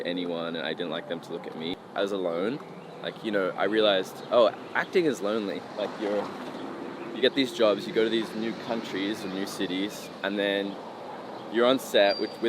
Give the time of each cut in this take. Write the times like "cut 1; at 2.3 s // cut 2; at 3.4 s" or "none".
cut 1; at 1.8 s